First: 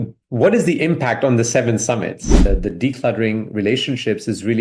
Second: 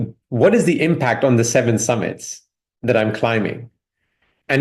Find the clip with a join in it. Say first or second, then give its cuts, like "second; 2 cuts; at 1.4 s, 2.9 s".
first; 1 cut; at 2.4 s